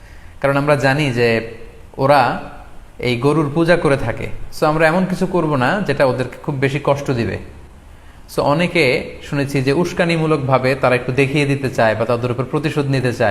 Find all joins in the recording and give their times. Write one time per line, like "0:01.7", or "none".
none